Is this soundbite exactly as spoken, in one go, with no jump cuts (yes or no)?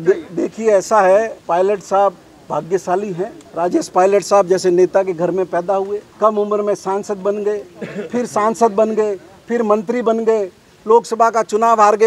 no